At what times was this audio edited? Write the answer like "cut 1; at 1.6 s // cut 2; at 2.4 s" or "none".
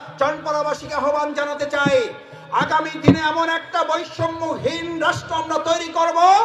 none